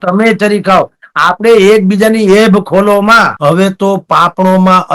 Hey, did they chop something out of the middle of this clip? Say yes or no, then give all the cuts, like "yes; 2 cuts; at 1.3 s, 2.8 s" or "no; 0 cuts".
yes; 1 cut; at 3.3 s